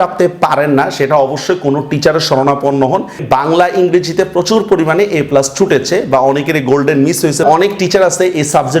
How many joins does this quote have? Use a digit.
1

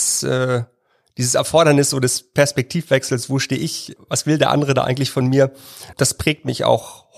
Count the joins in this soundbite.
2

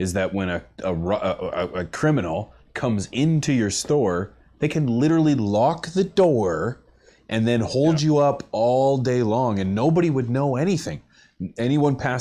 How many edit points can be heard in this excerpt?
0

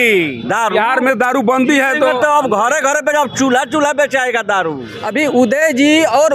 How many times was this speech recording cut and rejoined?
1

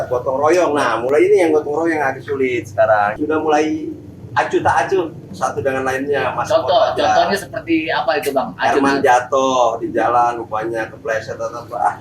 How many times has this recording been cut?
1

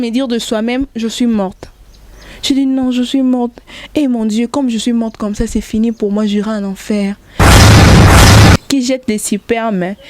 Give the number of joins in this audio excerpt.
2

